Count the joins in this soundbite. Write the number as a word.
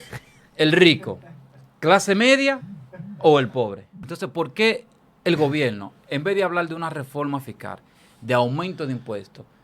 one